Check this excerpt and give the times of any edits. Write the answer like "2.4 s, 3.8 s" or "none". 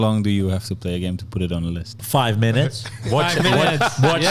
2.0 s

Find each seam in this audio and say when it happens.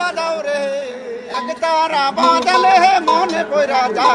1.2 s

